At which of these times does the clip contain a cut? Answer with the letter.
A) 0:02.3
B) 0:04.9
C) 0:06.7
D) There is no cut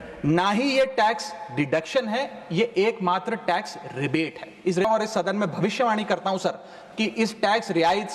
B